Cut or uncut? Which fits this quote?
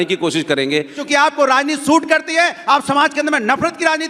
cut